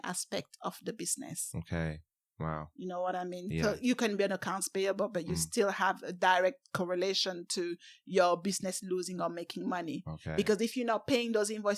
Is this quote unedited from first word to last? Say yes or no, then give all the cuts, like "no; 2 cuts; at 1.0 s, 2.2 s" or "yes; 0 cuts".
yes; 0 cuts